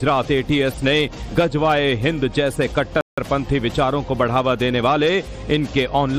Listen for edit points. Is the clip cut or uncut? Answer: uncut